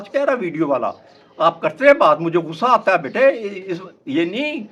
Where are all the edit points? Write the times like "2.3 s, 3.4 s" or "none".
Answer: none